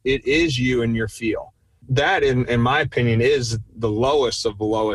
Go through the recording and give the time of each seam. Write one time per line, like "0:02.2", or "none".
0:01.9